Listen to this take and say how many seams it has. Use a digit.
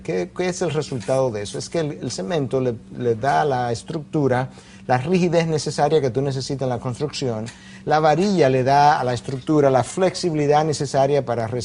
0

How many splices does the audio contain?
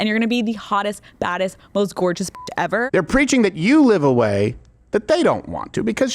1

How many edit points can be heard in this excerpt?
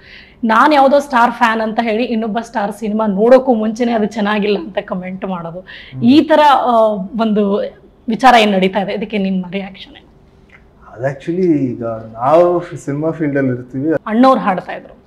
1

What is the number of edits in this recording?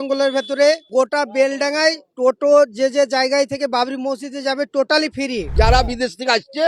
3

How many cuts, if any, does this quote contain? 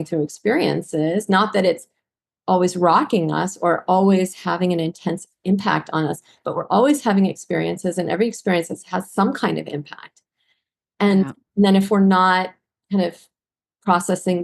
0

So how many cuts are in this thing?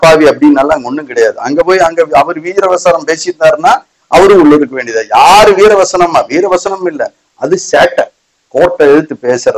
0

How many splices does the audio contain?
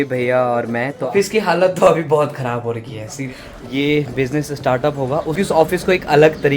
3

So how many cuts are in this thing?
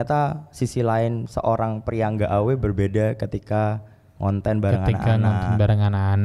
0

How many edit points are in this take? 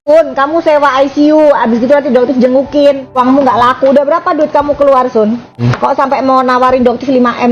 2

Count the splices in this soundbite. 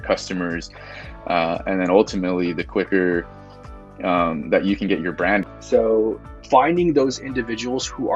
1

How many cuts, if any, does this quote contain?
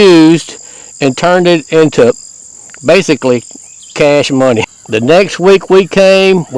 1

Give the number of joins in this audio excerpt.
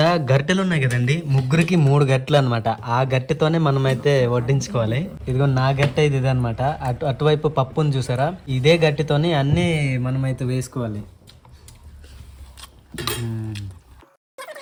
0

